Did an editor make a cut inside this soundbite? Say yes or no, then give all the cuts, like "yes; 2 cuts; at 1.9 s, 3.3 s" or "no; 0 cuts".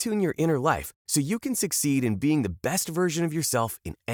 no; 0 cuts